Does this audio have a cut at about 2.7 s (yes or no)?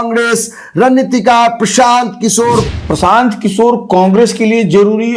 yes